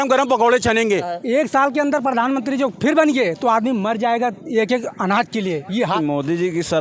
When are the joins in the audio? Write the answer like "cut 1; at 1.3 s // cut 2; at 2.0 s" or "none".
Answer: cut 1; at 1.1 s // cut 2; at 5.9 s